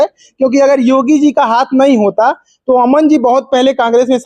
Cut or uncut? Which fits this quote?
uncut